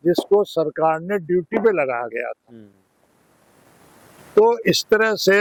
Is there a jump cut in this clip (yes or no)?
no